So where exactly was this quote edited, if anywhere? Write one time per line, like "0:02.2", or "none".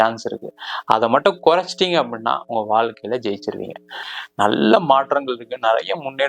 0:04.0